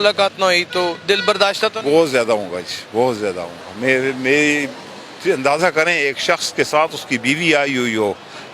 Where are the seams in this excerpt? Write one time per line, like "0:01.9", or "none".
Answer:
none